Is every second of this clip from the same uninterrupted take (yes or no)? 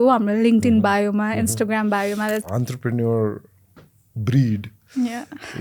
no